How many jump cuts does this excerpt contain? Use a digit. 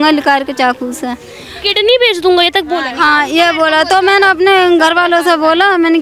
0